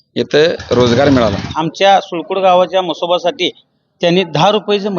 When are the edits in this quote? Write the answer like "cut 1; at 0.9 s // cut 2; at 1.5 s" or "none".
cut 1; at 1.5 s